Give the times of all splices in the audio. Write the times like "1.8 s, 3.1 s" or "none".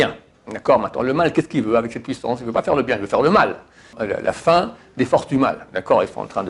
3.9 s